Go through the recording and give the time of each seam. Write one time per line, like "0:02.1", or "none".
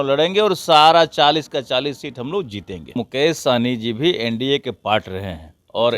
0:03.0